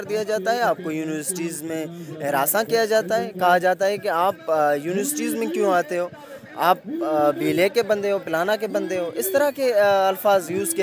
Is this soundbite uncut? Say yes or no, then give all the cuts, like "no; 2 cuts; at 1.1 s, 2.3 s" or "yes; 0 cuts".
yes; 0 cuts